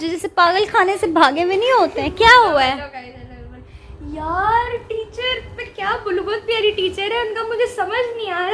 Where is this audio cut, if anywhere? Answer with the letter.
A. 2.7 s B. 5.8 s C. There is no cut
C